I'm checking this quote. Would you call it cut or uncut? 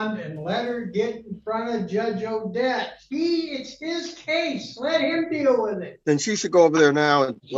uncut